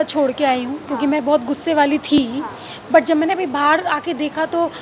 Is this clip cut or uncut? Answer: uncut